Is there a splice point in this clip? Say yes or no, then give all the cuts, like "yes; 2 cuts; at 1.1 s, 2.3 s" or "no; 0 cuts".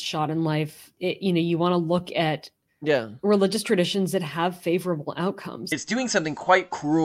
yes; 1 cut; at 5.8 s